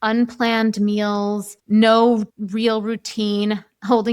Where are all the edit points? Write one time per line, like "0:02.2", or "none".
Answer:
0:01.5
0:02.4